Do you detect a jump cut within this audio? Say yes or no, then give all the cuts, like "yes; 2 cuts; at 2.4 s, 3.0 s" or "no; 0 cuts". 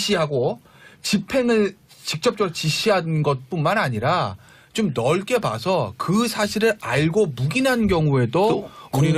no; 0 cuts